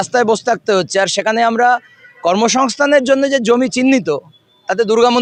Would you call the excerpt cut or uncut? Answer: uncut